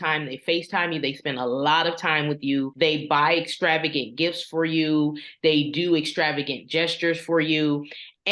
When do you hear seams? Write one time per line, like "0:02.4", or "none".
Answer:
0:02.7